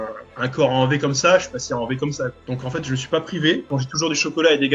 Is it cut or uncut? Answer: cut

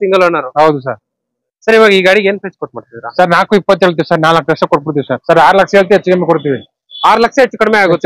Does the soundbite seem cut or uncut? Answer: cut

